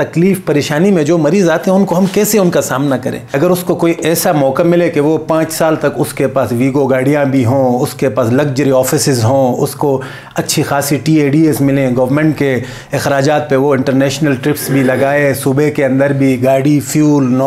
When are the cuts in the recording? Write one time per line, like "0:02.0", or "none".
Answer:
0:03.3